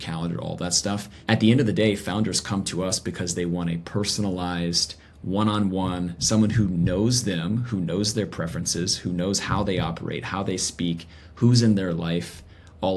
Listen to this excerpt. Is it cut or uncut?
cut